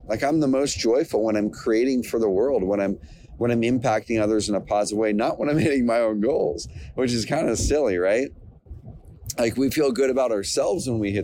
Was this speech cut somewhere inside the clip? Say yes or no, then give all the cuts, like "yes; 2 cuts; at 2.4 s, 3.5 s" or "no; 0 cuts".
no; 0 cuts